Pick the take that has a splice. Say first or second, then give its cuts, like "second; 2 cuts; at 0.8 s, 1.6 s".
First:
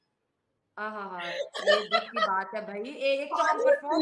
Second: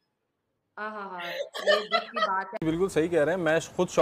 second; 1 cut; at 2.6 s